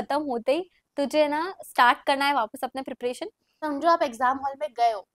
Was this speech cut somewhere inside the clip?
yes; 1 cut; at 3.5 s

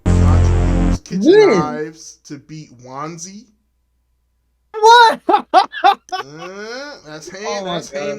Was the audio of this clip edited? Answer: yes; 1 cut; at 1.0 s

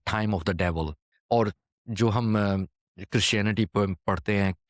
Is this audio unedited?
no; 1 cut; at 1.0 s

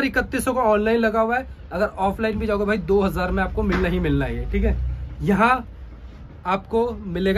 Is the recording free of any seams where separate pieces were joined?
yes; 0 cuts

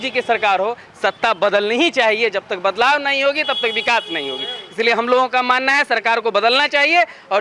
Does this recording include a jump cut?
no; 0 cuts

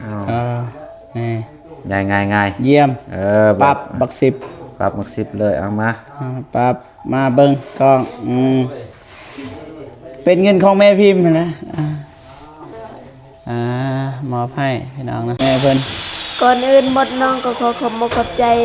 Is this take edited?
yes; 1 cut; at 15.4 s

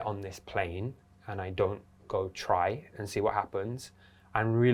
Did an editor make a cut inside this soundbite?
no; 0 cuts

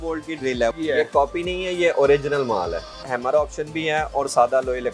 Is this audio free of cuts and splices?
no; 2 cuts; at 0.7 s, 3.0 s

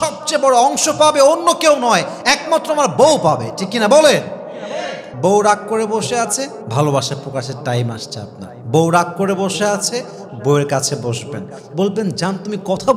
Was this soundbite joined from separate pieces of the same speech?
yes; 1 cut; at 5.0 s

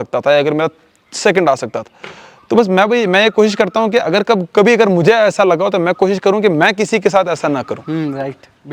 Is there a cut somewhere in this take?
no; 0 cuts

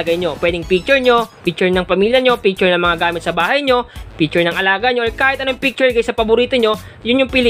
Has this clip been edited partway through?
no; 0 cuts

